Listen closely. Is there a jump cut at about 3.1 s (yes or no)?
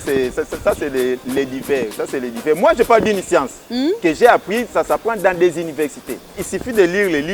no